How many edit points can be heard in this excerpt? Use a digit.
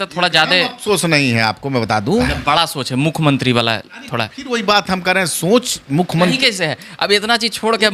1